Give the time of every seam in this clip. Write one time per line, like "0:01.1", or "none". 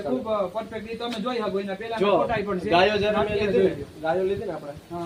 none